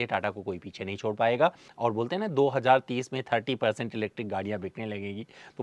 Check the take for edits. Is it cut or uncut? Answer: cut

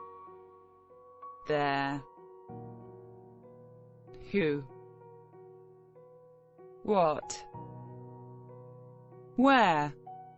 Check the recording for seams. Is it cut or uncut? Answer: uncut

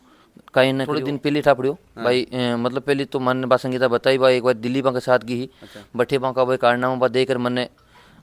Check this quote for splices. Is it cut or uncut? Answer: cut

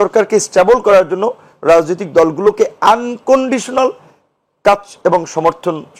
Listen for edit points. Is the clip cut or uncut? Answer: uncut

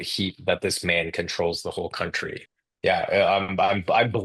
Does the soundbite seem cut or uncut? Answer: cut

